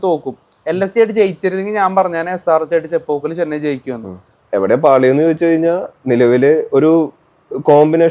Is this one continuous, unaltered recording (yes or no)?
no